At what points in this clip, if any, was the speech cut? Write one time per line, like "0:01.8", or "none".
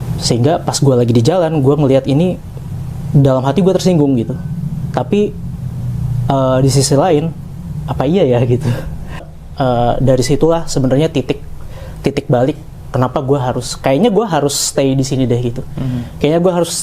0:09.3